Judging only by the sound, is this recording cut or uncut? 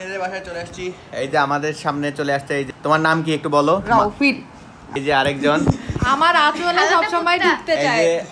cut